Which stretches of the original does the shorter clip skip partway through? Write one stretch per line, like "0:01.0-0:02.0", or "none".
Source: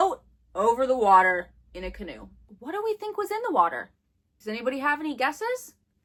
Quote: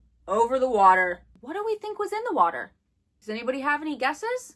0:01.6-0:02.5